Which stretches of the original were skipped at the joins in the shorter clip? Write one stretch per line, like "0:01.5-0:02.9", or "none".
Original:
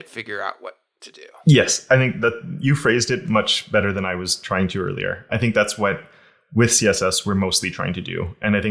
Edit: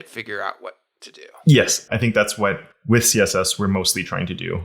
0:01.8-0:05.2
0:06.1-0:06.4

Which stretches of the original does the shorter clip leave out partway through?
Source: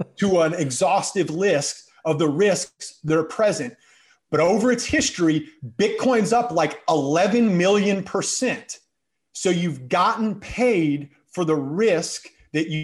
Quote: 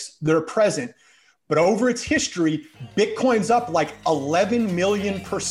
none

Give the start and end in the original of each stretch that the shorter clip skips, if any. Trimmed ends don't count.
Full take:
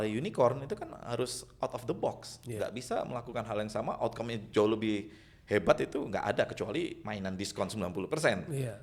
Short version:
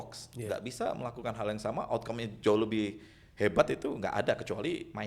none

